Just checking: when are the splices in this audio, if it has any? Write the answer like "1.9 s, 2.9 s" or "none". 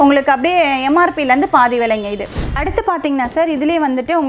none